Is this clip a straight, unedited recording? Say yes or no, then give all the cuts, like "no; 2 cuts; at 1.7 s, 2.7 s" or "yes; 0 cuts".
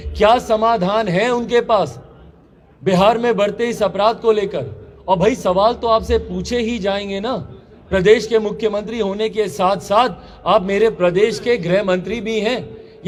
yes; 0 cuts